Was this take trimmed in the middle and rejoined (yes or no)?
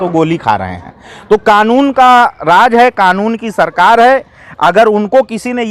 no